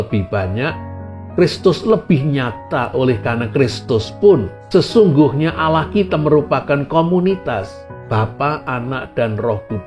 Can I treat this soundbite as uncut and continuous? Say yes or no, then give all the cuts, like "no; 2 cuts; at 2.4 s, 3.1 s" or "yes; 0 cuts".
no; 1 cut; at 4.5 s